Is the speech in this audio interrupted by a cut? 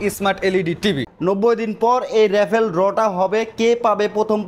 yes; 1 cut; at 1.1 s

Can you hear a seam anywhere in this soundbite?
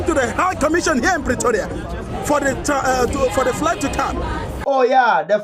yes; 1 cut; at 4.5 s

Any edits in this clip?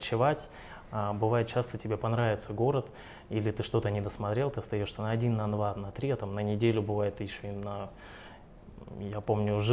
no; 0 cuts

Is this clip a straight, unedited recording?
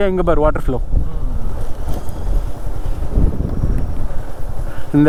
yes; 0 cuts

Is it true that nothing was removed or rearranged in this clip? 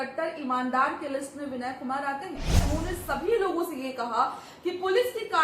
no; 1 cut; at 2.6 s

